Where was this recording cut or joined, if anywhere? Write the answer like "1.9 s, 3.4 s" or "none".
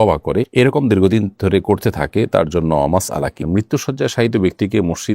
3.5 s

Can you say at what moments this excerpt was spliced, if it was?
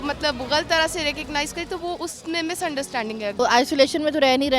3.3 s

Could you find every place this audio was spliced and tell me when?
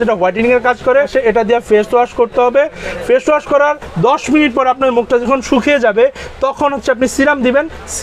1.1 s

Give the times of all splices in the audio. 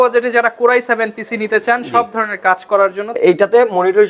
3.2 s

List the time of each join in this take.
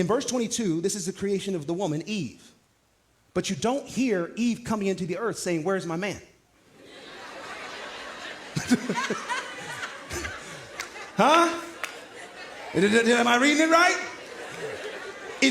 14.5 s

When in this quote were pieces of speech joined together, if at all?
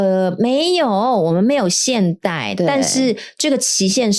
none

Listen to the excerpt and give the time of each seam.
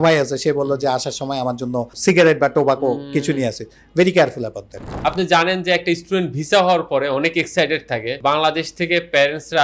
1.9 s, 4.9 s

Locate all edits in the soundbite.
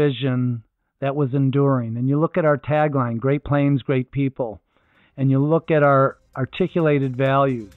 6.2 s

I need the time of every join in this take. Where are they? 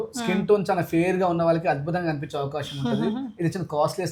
none

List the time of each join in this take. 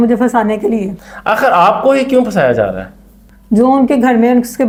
none

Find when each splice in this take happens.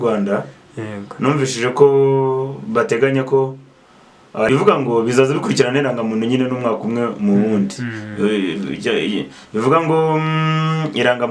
4.5 s

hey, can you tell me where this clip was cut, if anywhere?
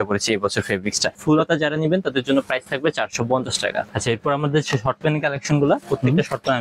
1.2 s, 3.9 s

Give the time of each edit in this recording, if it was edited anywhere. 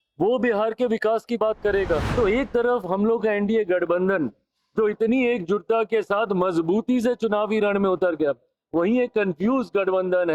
2.1 s

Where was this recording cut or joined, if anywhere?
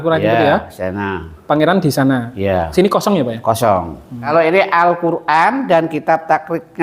4.1 s

